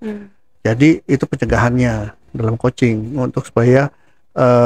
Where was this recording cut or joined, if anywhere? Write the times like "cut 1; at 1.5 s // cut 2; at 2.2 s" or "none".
none